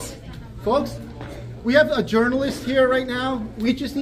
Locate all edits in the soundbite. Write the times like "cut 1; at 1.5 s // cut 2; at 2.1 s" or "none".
none